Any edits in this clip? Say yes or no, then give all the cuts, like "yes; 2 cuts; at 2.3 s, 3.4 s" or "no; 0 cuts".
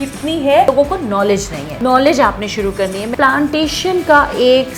yes; 3 cuts; at 0.7 s, 1.6 s, 3.1 s